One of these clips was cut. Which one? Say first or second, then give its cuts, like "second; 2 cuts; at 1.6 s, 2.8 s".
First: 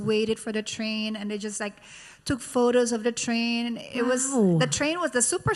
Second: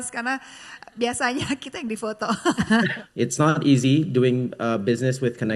second; 1 cut; at 2.9 s